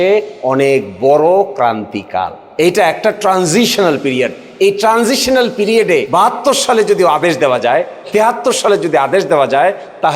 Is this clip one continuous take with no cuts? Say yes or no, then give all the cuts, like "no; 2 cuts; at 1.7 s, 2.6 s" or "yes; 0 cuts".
no; 2 cuts; at 2.4 s, 6.1 s